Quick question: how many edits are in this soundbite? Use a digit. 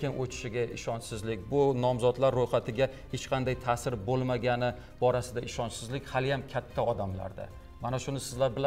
0